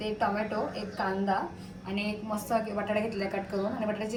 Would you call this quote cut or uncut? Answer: uncut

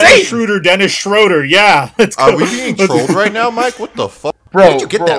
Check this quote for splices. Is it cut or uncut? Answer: cut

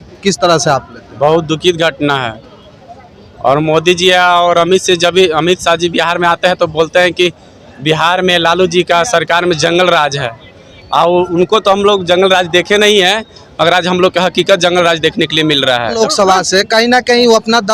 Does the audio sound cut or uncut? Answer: cut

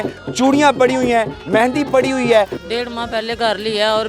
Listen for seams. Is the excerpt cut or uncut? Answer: cut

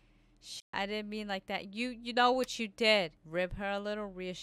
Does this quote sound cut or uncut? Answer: cut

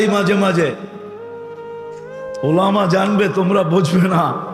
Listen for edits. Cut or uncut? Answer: cut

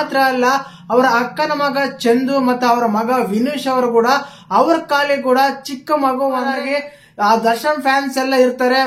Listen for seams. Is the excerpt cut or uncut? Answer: cut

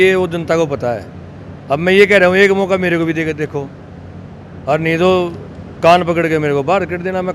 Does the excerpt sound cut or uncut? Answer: uncut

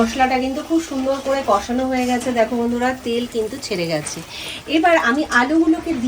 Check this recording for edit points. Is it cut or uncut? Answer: uncut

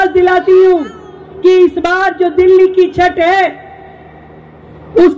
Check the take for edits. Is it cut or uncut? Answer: uncut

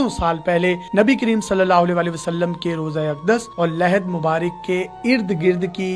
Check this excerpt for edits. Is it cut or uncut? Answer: uncut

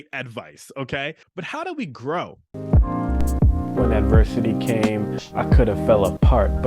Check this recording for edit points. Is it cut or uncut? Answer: cut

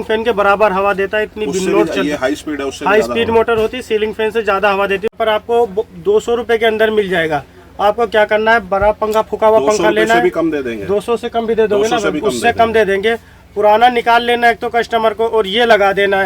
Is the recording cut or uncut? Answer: cut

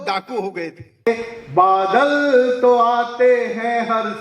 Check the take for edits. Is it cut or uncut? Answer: cut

